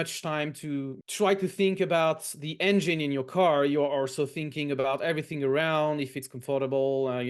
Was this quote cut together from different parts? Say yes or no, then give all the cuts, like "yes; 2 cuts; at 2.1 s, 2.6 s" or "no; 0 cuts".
yes; 1 cut; at 1.0 s